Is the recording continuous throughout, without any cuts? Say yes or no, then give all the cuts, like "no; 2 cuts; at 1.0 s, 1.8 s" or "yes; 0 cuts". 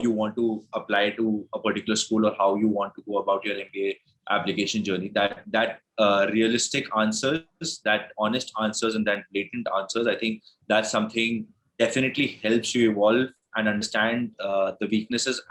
yes; 0 cuts